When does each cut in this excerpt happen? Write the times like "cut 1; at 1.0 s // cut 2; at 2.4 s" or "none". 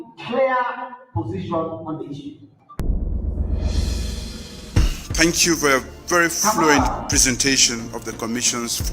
cut 1; at 2.5 s